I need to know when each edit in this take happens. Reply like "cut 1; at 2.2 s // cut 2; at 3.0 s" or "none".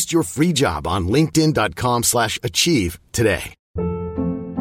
cut 1; at 3.6 s